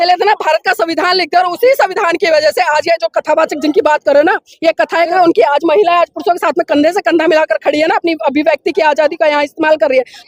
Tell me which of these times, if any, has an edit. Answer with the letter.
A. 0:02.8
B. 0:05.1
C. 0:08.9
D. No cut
B